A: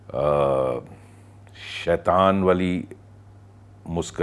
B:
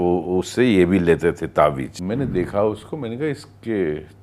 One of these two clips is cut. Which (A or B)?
B